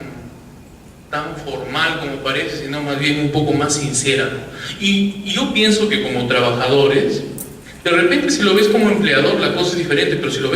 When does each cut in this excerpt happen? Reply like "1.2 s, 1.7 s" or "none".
1.6 s